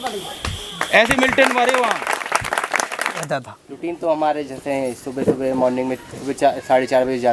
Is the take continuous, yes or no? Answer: no